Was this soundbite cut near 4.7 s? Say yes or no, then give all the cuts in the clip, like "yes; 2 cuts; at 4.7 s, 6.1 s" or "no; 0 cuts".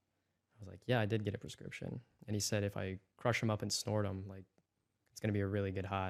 no; 0 cuts